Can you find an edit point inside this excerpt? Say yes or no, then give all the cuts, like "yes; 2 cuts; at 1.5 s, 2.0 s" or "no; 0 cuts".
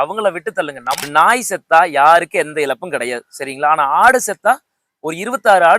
yes; 1 cut; at 1.0 s